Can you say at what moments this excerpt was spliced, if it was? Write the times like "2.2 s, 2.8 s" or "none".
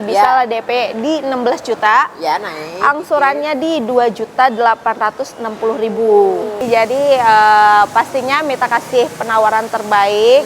6.7 s